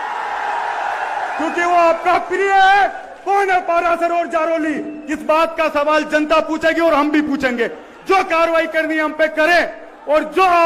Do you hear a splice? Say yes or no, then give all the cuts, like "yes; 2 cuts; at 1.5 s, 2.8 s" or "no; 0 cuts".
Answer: no; 0 cuts